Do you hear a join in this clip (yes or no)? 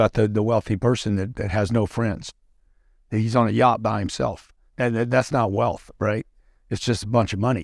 no